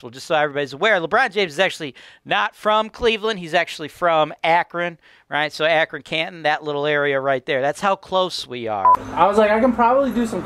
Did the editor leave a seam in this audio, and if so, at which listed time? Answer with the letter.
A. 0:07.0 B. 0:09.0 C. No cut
B